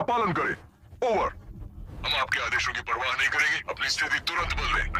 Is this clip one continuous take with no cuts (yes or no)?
no